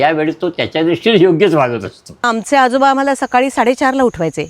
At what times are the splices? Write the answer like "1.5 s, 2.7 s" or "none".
2.2 s